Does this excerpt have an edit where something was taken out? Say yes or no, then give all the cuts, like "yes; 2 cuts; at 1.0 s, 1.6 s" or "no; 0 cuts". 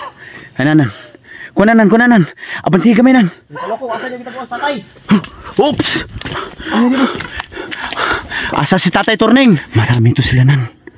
yes; 1 cut; at 9.7 s